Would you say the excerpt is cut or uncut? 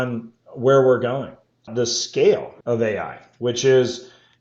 cut